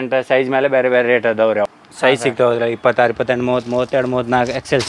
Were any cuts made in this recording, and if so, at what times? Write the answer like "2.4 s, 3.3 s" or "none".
1.7 s